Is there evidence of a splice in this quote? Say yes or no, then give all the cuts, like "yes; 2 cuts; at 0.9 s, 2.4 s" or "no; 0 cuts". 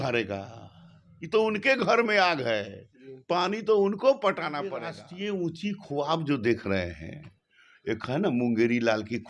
yes; 1 cut; at 5.0 s